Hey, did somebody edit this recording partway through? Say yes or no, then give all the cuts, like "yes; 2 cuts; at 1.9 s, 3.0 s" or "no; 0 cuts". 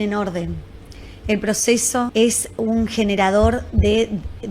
yes; 1 cut; at 2.1 s